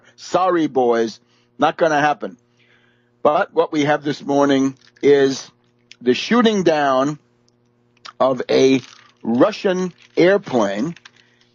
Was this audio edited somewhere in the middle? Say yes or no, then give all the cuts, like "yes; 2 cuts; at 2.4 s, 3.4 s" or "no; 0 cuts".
no; 0 cuts